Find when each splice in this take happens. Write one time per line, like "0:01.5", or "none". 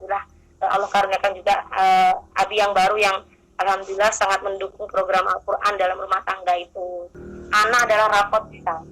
0:07.1